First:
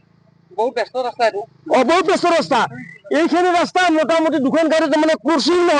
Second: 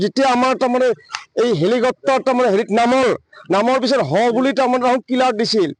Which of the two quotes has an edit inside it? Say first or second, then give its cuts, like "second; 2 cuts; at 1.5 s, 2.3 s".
first; 1 cut; at 4.7 s